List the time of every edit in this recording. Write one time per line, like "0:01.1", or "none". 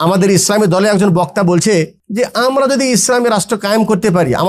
0:02.0